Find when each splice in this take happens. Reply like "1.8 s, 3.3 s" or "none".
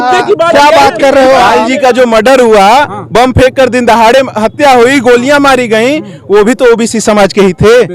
1.6 s